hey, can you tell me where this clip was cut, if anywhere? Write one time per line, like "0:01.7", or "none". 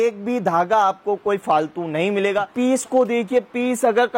0:02.5